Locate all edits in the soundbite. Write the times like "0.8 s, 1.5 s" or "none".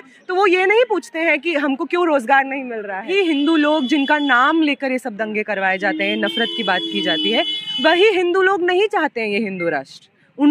3.1 s

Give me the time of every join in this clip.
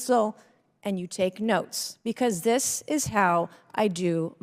none

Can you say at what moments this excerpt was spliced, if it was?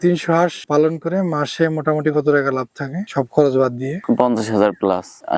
none

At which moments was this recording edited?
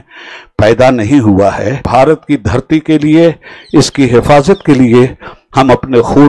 1.8 s

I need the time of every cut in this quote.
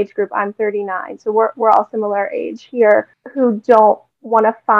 3.2 s

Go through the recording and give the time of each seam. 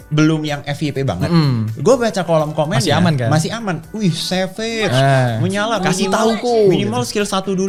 none

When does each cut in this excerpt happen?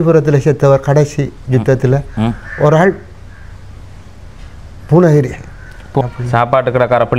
6.0 s

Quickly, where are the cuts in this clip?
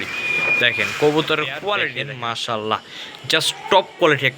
2.0 s

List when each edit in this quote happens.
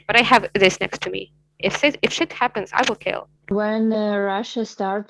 3.5 s

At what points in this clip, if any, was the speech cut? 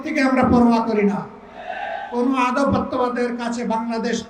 none

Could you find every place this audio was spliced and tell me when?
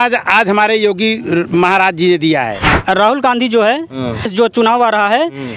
2.7 s, 4.3 s

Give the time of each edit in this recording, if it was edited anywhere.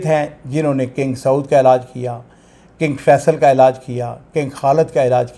none

